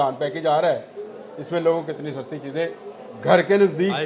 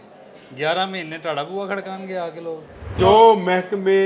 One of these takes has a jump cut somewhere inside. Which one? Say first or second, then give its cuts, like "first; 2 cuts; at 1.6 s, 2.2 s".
second; 1 cut; at 2.9 s